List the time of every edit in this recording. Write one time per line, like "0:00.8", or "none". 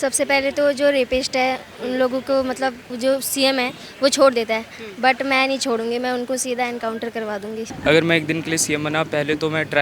0:02.9
0:07.7